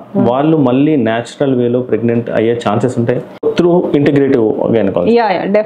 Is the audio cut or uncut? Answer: cut